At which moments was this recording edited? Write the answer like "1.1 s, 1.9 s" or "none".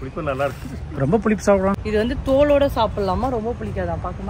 1.8 s